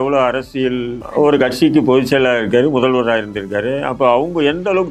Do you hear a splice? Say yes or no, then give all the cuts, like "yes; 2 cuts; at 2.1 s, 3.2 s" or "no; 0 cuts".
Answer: no; 0 cuts